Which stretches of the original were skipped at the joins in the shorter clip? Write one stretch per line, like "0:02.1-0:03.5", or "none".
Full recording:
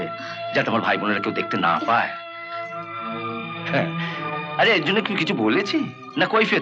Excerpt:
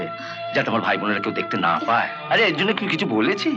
0:02.2-0:04.5